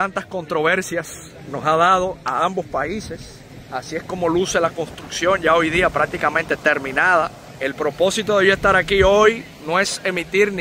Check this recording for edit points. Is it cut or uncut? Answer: uncut